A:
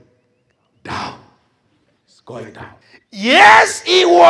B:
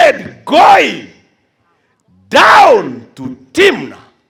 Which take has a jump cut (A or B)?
A